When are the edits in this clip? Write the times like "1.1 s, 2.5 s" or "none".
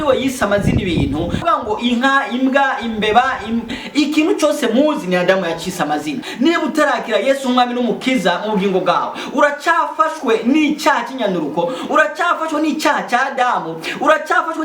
1.4 s, 6.2 s